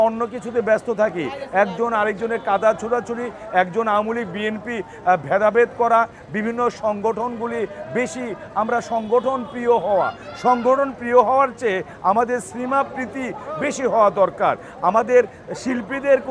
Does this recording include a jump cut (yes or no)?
no